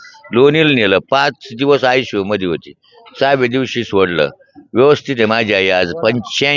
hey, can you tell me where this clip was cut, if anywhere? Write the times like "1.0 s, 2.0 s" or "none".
none